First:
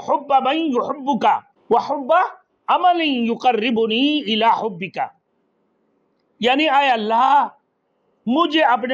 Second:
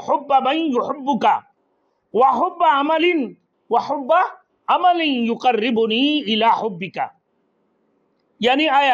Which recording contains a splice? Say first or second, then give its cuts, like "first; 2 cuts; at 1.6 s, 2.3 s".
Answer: first; 1 cut; at 1.5 s